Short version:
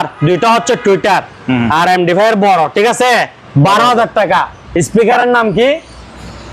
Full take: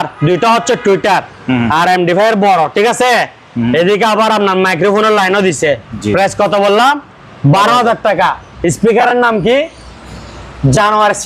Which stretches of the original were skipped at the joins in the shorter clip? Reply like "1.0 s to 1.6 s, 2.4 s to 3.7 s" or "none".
3.4 s to 7.3 s